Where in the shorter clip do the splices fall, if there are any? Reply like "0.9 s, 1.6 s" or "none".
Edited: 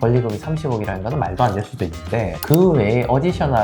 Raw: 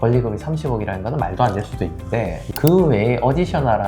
2.4 s